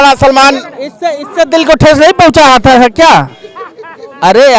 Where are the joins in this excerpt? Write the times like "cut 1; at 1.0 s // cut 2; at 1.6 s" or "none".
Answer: none